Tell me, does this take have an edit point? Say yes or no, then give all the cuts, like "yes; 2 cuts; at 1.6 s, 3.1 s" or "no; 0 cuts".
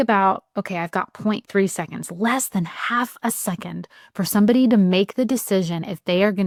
no; 0 cuts